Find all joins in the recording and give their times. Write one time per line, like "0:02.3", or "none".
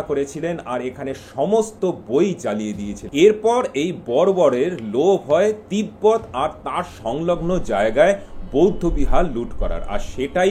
0:02.9